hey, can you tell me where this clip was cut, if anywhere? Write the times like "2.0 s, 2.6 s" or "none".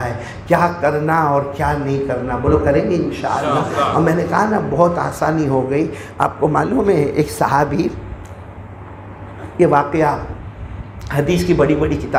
none